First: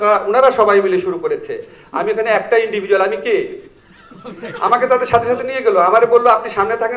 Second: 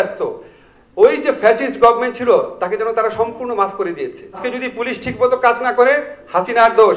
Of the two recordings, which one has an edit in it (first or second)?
second